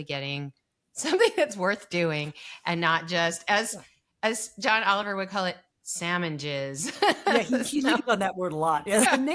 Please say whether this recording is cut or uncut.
uncut